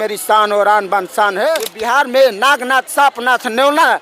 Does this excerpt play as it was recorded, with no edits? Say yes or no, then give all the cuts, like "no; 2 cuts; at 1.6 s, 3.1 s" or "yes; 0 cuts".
no; 1 cut; at 1.7 s